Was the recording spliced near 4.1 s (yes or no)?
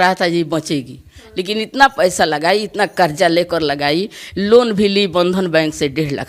no